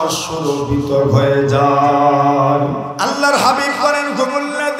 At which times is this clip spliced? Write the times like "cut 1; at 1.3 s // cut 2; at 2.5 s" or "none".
cut 1; at 2.9 s